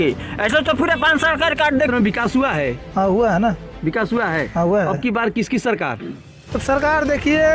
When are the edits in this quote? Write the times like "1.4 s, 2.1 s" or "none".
1.9 s

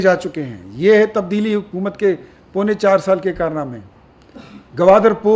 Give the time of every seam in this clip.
none

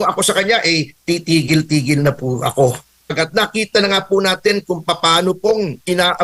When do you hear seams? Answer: 3.1 s

